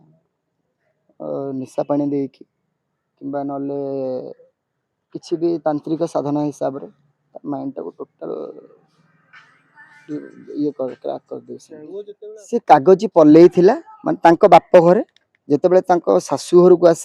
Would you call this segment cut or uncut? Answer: cut